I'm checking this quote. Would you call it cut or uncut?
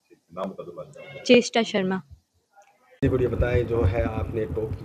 cut